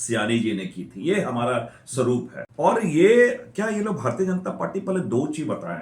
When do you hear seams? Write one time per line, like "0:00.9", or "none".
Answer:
0:02.4